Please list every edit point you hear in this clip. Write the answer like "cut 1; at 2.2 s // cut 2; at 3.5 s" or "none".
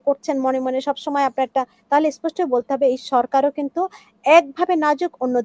none